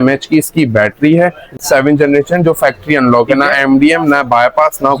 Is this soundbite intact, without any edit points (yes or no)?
no